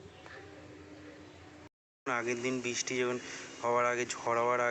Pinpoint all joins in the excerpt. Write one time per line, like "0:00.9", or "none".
none